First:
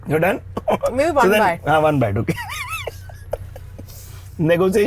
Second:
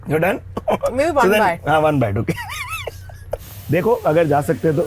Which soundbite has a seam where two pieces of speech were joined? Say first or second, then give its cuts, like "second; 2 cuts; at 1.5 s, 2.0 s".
second; 1 cut; at 3.5 s